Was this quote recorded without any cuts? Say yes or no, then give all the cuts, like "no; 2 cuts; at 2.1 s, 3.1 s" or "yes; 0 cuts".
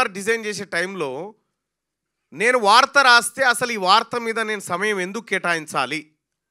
yes; 0 cuts